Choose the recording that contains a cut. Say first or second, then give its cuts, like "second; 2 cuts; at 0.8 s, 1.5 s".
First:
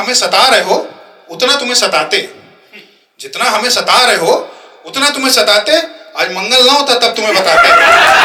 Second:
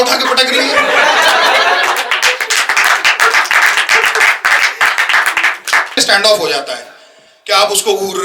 second; 1 cut; at 5.9 s